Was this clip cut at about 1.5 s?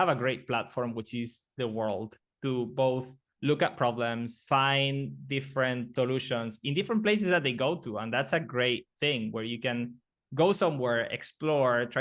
no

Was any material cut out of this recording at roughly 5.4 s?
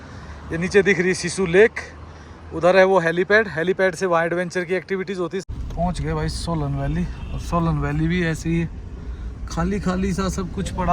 yes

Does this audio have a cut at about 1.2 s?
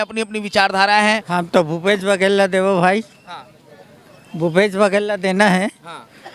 yes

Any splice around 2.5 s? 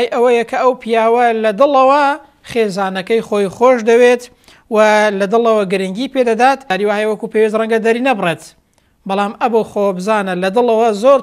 no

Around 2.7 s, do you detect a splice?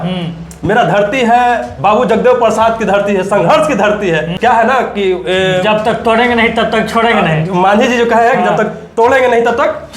no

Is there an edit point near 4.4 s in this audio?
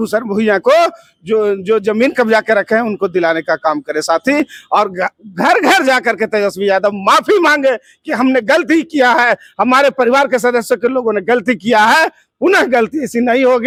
no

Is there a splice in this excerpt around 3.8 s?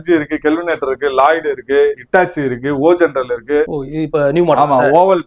yes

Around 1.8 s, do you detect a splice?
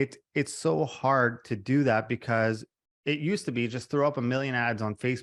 no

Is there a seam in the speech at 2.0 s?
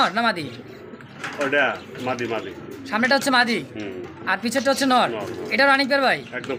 no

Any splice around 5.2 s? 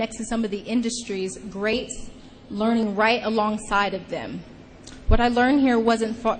yes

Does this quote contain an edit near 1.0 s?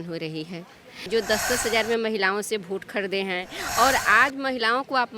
yes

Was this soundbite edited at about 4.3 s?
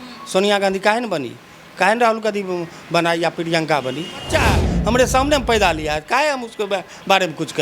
yes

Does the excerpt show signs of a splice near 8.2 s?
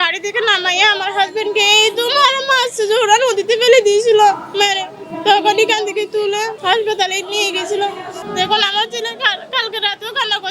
yes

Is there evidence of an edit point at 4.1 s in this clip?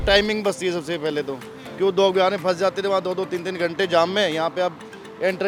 no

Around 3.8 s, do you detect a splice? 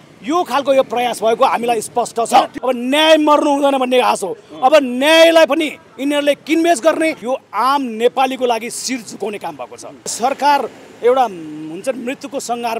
no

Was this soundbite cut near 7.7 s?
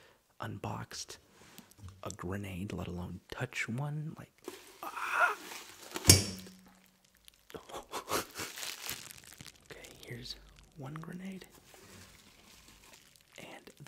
no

